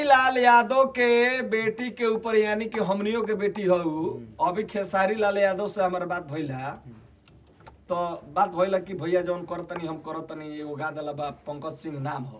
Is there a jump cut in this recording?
no; 0 cuts

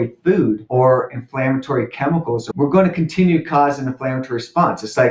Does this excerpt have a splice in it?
yes; 1 cut; at 2.4 s

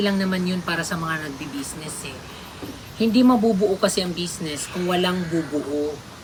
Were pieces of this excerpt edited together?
no; 0 cuts

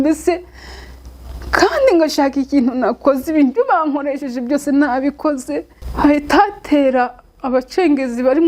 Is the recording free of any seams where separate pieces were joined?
no; 1 cut; at 5.8 s

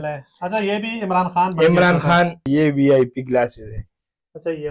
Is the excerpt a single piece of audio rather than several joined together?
no; 1 cut; at 2.5 s

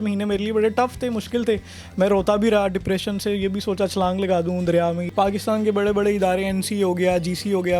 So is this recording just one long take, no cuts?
no; 1 cut; at 5.0 s

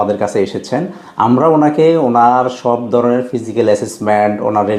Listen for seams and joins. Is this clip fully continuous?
yes; 0 cuts

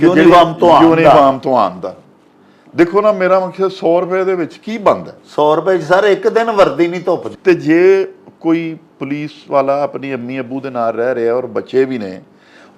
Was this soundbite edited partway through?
yes; 1 cut; at 7.3 s

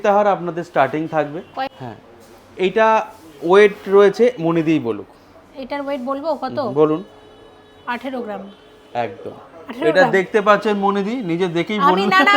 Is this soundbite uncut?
no; 1 cut; at 1.7 s

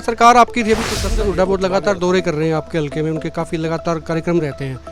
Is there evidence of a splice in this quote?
yes; 1 cut; at 1.0 s

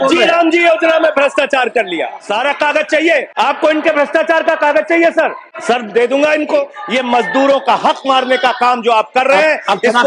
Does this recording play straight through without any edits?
no; 4 cuts; at 2.2 s, 3.3 s, 5.5 s, 6.8 s

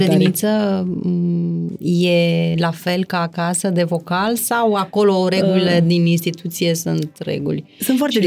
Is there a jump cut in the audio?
no; 0 cuts

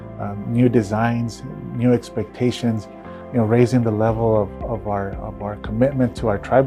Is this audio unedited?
yes; 0 cuts

